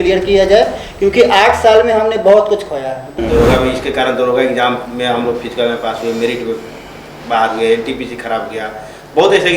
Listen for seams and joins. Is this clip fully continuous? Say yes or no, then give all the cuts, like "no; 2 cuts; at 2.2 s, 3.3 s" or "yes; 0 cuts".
no; 1 cut; at 3.0 s